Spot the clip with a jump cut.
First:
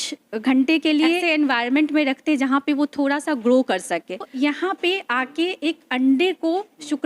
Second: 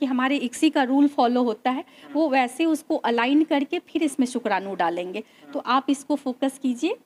first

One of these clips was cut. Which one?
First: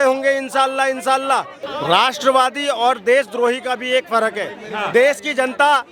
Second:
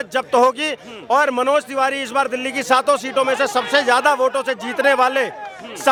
first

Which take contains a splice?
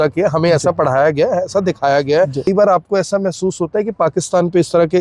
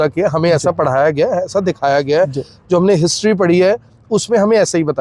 first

